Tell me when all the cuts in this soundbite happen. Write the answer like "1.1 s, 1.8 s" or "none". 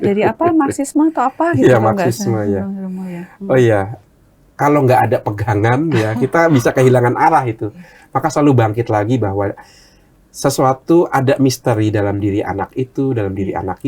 4.0 s